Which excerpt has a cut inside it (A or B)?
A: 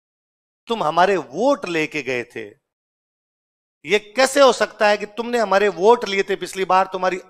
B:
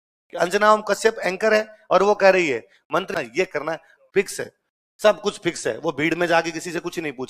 B